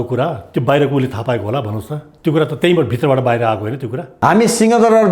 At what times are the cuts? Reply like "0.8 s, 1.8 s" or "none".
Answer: 4.1 s